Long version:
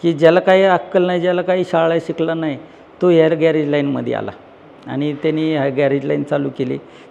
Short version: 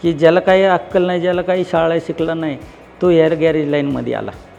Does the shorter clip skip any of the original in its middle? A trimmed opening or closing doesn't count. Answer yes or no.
no